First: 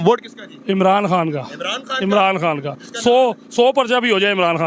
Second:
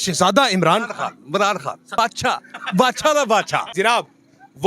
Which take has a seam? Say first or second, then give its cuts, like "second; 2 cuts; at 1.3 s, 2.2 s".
second; 2 cuts; at 2.0 s, 3.7 s